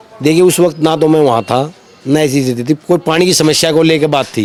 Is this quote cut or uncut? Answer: uncut